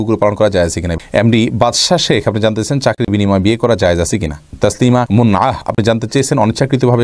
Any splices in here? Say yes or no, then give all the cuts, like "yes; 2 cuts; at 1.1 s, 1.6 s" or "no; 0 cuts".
yes; 2 cuts; at 0.9 s, 4.5 s